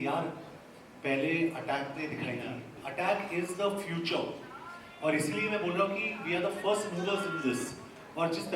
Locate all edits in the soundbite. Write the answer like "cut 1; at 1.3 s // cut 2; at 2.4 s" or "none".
cut 1; at 2.8 s